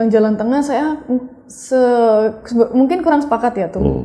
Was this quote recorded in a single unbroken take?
yes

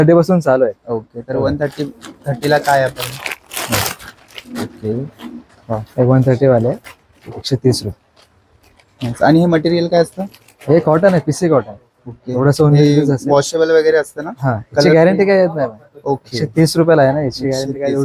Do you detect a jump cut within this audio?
no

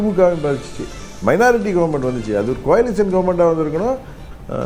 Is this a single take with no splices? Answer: yes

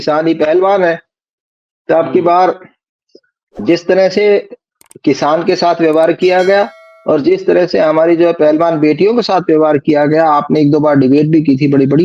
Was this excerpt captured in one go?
yes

